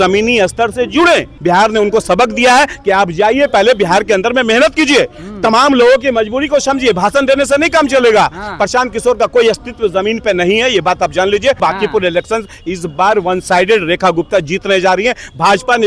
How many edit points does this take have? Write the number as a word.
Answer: two